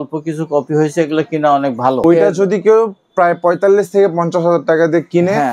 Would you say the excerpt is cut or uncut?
cut